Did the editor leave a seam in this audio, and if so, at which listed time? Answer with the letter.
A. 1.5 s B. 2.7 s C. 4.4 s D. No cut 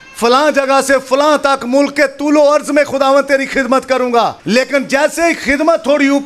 C